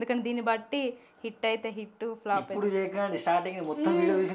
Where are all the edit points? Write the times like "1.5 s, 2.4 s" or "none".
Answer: none